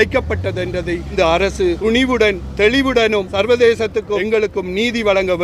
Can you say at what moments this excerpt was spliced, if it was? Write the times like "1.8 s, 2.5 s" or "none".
1.1 s, 1.8 s, 3.3 s, 4.2 s

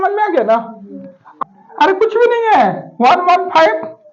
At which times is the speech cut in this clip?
1.3 s

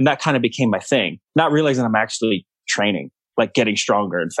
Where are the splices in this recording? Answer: 1.2 s, 3.2 s

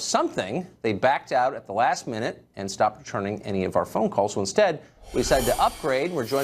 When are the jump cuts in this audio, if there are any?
5.3 s

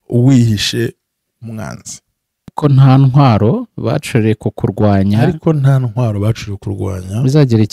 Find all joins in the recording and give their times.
2.5 s

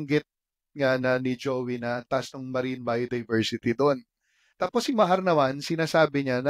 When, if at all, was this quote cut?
none

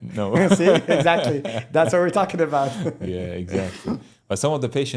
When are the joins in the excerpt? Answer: none

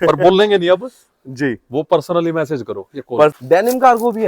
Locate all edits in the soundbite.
3.3 s

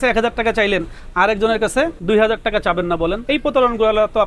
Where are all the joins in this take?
2.0 s, 3.2 s

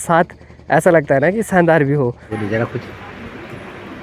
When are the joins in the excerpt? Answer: 2.3 s

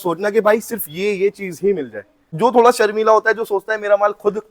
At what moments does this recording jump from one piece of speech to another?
2.3 s

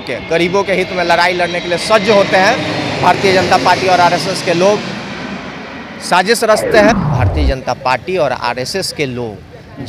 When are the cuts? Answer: 7.1 s

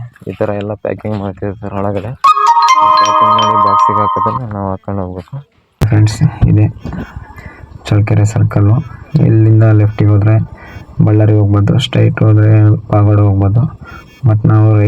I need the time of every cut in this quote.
5.8 s

